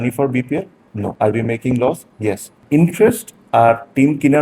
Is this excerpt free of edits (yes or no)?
no